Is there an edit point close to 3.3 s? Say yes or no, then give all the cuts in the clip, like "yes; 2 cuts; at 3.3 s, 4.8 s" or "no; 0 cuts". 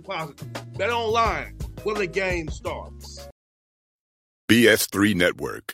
yes; 1 cut; at 3.3 s